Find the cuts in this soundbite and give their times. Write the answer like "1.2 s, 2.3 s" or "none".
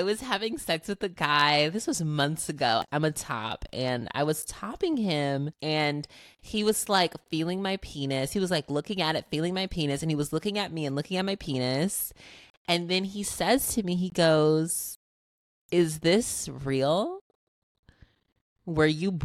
2.8 s, 5.5 s